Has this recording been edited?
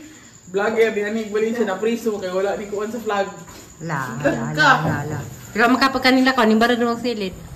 yes; 1 cut; at 5.8 s

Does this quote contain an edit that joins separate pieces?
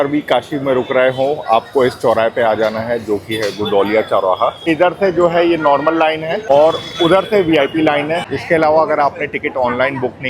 yes; 2 cuts; at 4.7 s, 8.2 s

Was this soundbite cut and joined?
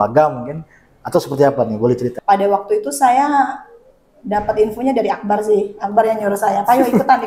yes; 1 cut; at 2.2 s

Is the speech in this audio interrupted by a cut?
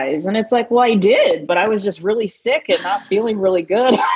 no; 0 cuts

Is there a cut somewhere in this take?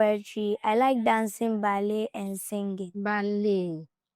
no; 0 cuts

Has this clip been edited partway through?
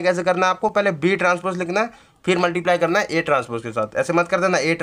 no; 0 cuts

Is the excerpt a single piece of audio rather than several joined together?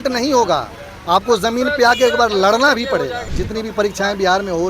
no; 1 cut; at 3.3 s

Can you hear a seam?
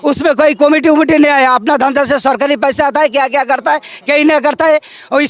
no; 0 cuts

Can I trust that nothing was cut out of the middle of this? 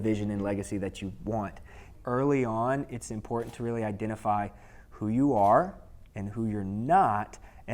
no; 1 cut; at 1.9 s

